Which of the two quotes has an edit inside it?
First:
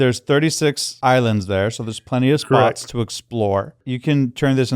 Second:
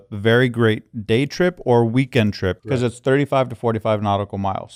first; 1 cut; at 3.8 s

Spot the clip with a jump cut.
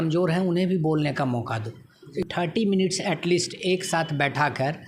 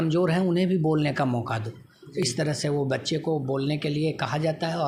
first; 1 cut; at 2.3 s

